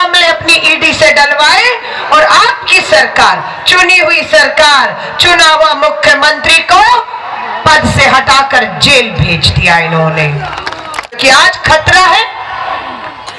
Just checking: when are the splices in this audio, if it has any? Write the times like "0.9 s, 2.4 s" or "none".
11.2 s